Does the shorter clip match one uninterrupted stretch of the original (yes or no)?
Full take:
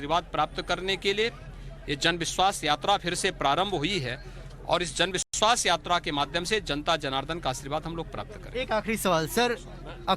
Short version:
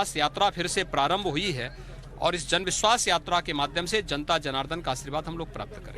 no